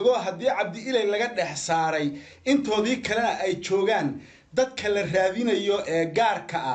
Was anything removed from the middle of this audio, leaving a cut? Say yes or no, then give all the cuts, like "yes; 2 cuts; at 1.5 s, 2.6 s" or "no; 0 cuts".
no; 0 cuts